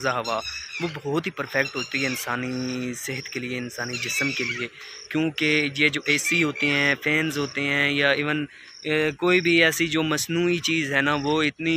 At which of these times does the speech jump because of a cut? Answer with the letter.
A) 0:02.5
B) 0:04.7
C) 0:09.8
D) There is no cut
D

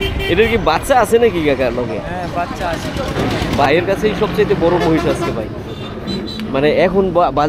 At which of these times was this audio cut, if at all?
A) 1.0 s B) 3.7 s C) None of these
B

